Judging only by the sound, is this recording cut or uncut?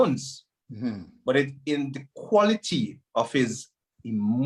uncut